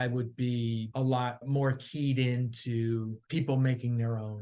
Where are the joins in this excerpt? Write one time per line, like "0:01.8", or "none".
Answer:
0:01.1
0:03.2

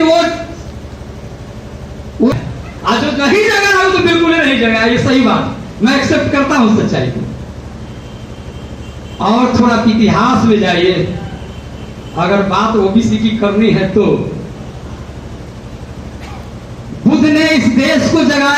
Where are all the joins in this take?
0:02.3

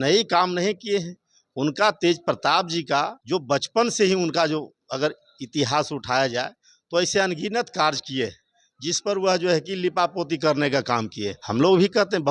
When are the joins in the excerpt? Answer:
0:03.2
0:11.4

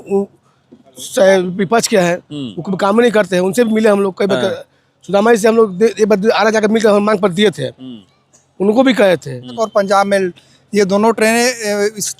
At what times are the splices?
0:09.6

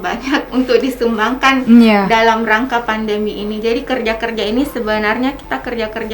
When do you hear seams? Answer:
none

